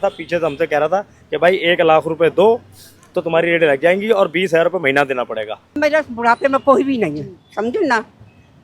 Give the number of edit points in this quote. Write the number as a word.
one